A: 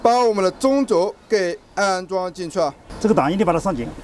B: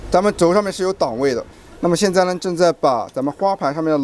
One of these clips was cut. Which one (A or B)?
B